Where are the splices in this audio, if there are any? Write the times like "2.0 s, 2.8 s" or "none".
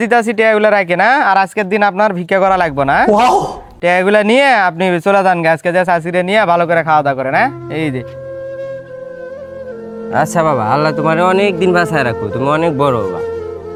none